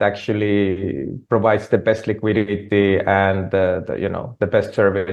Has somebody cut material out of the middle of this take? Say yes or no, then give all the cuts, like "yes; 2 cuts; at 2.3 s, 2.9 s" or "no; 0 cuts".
no; 0 cuts